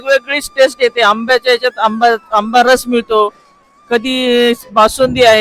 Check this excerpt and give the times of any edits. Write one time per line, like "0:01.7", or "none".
none